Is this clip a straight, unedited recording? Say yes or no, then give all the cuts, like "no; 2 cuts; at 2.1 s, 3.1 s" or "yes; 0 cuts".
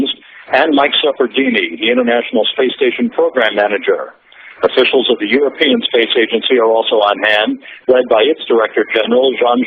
yes; 0 cuts